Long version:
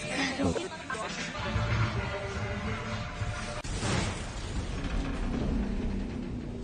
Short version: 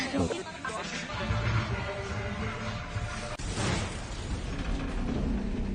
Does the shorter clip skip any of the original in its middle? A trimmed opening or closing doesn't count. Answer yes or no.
no